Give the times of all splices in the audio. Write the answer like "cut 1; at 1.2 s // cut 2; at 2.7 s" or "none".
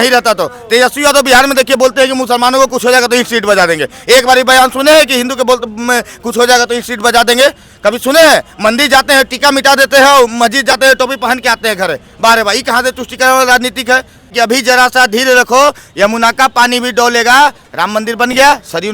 cut 1; at 14.3 s

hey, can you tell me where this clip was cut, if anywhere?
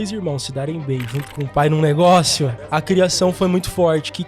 cut 1; at 2.7 s

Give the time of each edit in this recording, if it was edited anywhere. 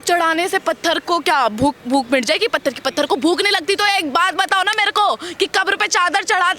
none

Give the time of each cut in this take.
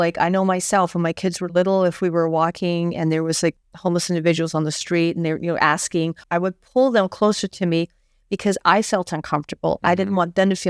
cut 1; at 3.6 s // cut 2; at 6.2 s

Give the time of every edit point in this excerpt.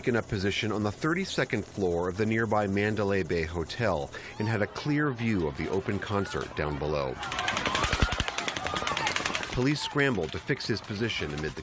cut 1; at 4.8 s

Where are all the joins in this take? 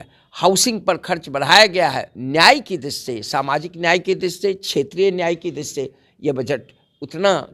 cut 1; at 2.1 s

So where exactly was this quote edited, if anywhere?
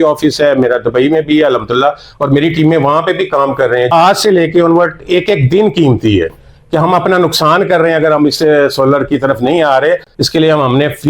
cut 1; at 3.9 s // cut 2; at 10.1 s

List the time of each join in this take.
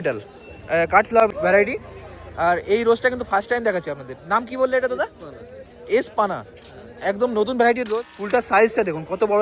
cut 1; at 1.3 s // cut 2; at 7.9 s

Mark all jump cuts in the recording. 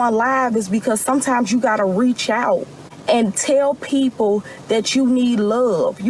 none

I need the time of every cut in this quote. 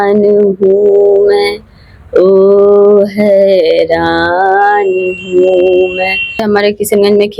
cut 1; at 6.3 s

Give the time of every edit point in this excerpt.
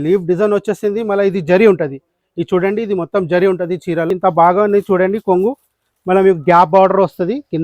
cut 1; at 4.1 s

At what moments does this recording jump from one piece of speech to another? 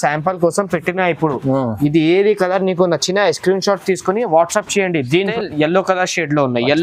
cut 1; at 5.3 s

